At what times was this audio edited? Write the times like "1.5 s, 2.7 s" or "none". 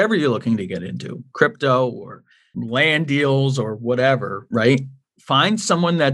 2.6 s